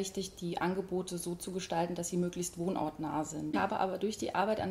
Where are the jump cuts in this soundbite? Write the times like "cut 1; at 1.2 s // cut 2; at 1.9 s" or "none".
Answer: cut 1; at 3.5 s